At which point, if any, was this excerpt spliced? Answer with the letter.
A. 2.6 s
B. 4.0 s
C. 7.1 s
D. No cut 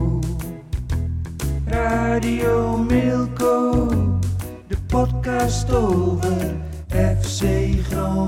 D